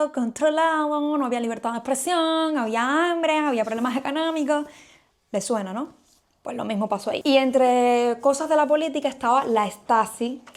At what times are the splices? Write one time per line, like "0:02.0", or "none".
none